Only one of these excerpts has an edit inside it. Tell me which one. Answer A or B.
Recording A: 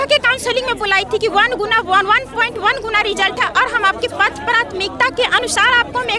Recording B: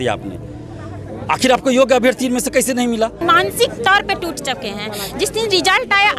B